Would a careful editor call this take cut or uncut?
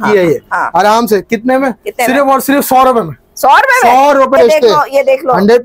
cut